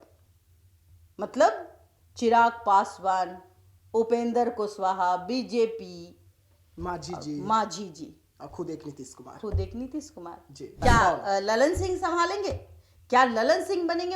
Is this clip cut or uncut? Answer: cut